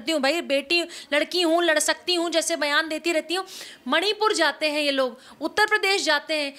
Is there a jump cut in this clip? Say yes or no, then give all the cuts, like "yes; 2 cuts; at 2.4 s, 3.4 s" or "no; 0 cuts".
no; 0 cuts